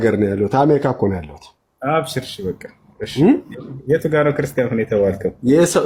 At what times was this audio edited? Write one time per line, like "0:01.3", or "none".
none